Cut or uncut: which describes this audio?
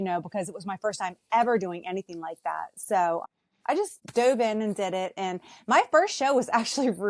uncut